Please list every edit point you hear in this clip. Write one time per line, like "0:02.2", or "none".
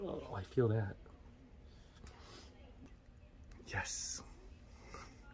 0:02.8